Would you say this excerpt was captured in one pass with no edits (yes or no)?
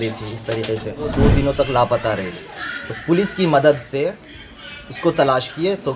no